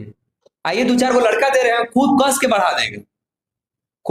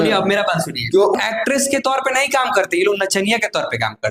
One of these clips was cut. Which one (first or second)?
second